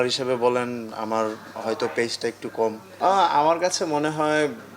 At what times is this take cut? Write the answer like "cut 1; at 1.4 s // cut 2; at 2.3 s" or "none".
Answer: cut 1; at 2.9 s